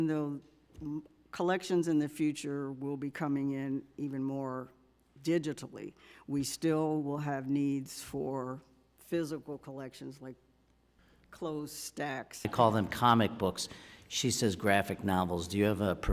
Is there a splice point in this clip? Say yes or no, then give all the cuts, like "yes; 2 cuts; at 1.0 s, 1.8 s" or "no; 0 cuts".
yes; 1 cut; at 12.5 s